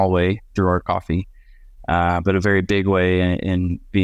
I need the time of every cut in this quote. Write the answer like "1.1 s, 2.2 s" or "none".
none